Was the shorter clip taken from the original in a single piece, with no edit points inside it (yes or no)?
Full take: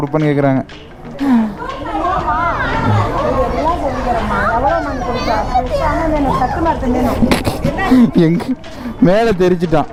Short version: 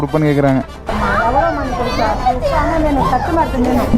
no